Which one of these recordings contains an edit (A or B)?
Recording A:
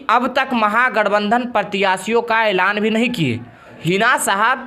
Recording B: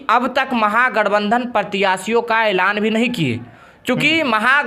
A